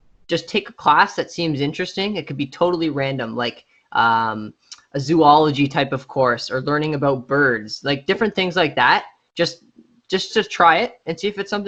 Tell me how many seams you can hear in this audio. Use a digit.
0